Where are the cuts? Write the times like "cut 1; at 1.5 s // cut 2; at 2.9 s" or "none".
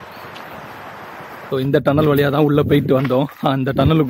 cut 1; at 1.4 s

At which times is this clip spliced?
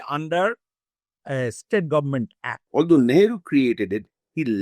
cut 1; at 2.5 s

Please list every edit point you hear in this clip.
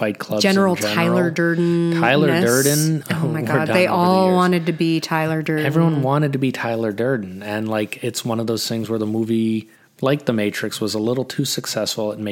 cut 1; at 3.0 s

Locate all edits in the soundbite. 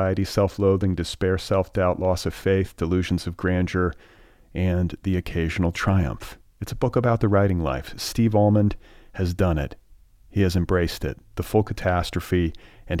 none

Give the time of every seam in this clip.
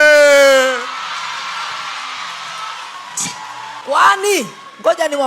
cut 1; at 3.8 s

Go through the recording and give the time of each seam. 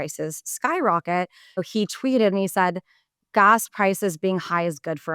cut 1; at 1.6 s // cut 2; at 3.1 s

